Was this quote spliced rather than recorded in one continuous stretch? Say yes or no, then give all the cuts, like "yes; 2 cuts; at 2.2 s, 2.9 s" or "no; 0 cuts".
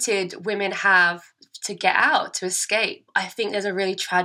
yes; 1 cut; at 3.0 s